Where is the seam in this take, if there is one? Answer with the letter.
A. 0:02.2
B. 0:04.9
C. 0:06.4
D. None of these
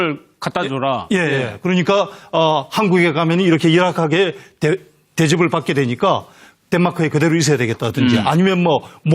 A